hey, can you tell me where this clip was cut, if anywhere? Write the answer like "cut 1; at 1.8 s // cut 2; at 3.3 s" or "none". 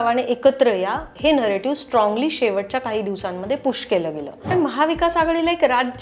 cut 1; at 4.5 s